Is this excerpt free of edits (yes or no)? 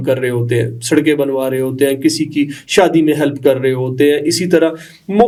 yes